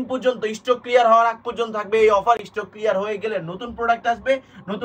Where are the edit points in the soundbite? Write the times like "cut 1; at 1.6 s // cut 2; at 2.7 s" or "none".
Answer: none